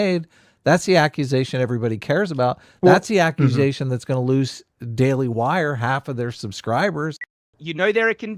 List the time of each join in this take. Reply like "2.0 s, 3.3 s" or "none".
7.3 s